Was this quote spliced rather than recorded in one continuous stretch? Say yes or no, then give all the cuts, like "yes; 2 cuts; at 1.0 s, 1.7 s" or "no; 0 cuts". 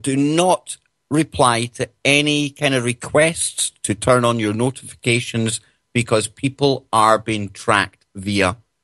no; 0 cuts